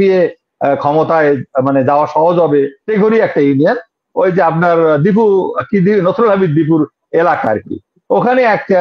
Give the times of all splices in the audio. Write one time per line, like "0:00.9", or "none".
0:02.8